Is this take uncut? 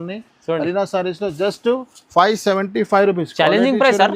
yes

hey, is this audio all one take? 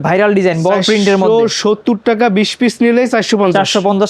yes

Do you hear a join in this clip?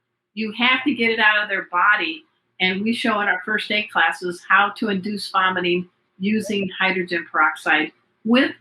no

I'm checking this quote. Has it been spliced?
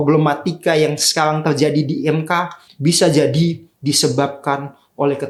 no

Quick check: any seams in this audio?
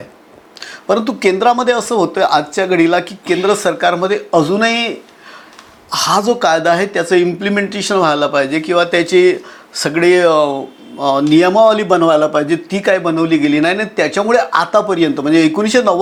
no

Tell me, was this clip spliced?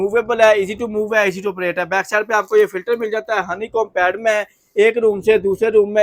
no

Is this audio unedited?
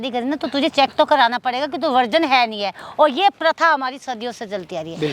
yes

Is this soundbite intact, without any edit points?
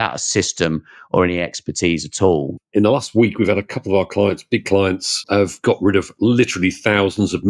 no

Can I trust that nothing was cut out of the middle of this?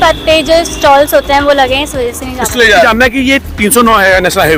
yes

